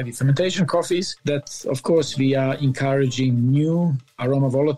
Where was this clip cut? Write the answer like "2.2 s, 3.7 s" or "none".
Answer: 1.1 s

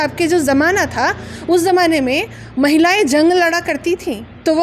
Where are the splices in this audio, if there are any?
none

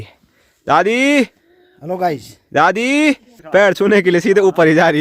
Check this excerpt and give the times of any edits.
3.3 s

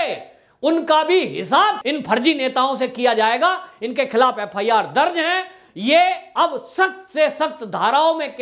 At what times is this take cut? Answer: none

